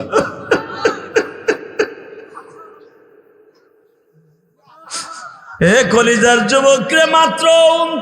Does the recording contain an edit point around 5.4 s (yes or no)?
yes